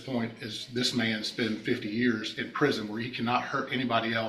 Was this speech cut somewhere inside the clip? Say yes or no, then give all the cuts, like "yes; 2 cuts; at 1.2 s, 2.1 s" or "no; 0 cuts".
no; 0 cuts